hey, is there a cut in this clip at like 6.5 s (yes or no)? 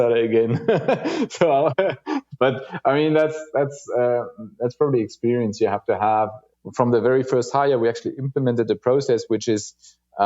yes